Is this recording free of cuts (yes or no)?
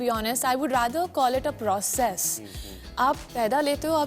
yes